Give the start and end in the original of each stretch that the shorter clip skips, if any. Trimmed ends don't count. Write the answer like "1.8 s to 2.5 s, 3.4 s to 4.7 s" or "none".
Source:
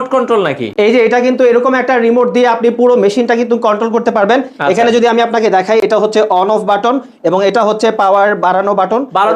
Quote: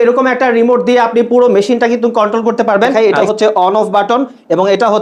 4.4 s to 5.7 s